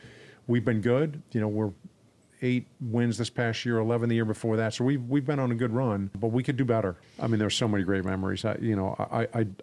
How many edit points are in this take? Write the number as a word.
three